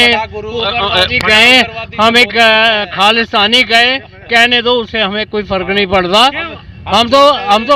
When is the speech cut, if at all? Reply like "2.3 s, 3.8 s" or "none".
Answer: none